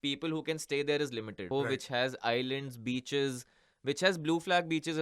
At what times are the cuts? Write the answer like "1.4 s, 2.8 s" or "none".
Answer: 1.5 s